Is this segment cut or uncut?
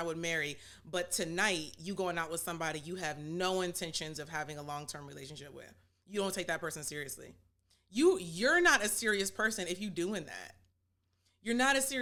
uncut